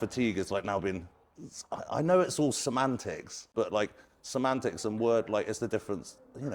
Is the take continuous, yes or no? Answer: no